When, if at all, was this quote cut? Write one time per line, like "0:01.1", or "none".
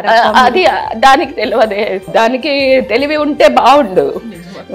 0:02.1